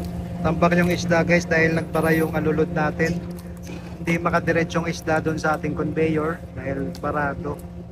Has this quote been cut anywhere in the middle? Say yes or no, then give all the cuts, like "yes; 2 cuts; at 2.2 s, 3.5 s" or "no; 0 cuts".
no; 0 cuts